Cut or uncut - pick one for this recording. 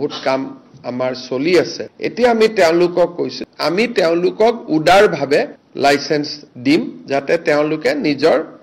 cut